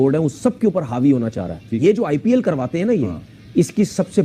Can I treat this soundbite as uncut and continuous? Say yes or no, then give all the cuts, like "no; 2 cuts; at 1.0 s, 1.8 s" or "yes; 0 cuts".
yes; 0 cuts